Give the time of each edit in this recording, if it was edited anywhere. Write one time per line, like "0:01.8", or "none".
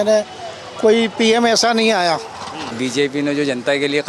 0:02.7